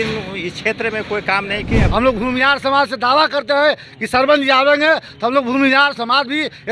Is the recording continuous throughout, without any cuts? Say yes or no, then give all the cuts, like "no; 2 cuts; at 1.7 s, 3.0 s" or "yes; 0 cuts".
no; 1 cut; at 1.8 s